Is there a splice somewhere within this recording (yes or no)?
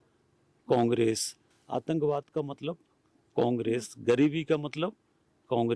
no